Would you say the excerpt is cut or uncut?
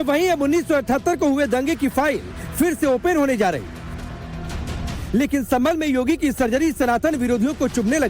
cut